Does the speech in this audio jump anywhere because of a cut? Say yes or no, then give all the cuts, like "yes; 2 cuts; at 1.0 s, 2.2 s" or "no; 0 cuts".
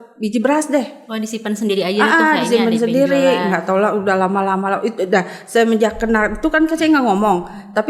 no; 0 cuts